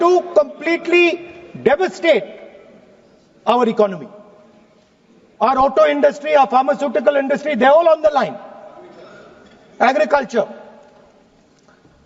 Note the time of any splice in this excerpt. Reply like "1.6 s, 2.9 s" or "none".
none